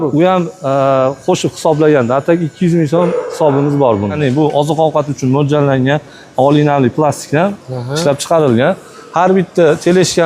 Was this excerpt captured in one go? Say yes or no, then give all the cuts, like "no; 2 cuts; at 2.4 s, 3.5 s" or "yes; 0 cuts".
no; 1 cut; at 4.2 s